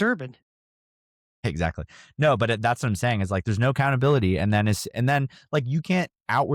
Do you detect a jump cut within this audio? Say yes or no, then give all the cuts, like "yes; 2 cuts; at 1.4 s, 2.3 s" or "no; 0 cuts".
no; 0 cuts